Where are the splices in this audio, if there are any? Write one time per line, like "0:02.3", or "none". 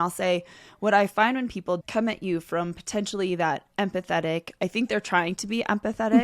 0:01.8